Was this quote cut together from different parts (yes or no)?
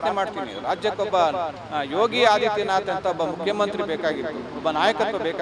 no